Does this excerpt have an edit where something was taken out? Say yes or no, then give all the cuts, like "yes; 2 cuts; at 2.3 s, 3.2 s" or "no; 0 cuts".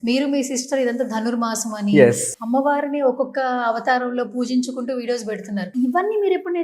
yes; 2 cuts; at 2.3 s, 5.7 s